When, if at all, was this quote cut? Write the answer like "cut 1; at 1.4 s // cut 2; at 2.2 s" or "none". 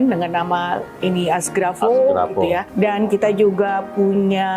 cut 1; at 2.7 s